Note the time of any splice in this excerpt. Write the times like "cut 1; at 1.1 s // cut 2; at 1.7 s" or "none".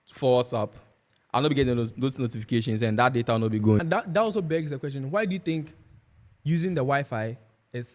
cut 1; at 3.8 s